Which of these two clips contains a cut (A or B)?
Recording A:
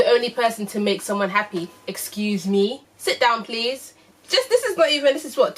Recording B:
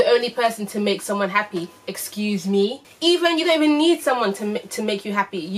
A